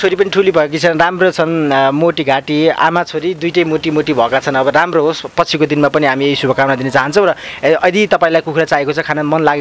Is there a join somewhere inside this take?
no; 0 cuts

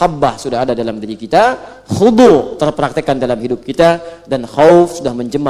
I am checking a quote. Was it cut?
no; 0 cuts

